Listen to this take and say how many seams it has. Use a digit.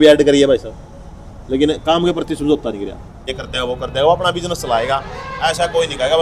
1